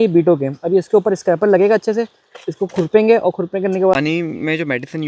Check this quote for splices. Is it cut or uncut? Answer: cut